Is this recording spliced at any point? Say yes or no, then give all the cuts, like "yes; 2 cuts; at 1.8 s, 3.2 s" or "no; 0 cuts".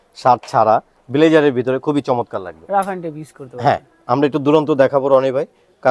no; 0 cuts